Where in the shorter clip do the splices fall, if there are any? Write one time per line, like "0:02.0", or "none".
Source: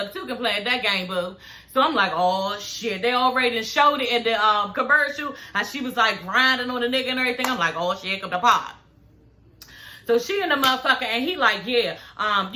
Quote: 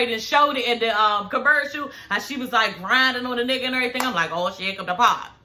none